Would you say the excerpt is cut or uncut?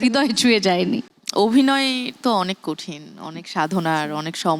uncut